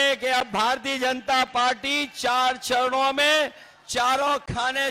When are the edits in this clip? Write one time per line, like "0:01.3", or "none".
none